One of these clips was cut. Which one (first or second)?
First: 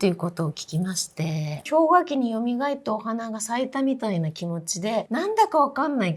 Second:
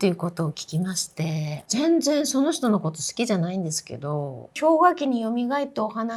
first